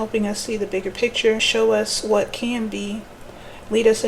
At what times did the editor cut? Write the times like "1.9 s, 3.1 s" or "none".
1.5 s